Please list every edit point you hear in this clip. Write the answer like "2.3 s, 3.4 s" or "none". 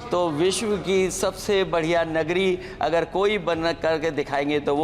none